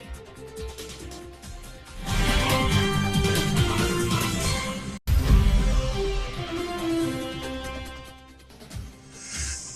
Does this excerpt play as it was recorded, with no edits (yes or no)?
yes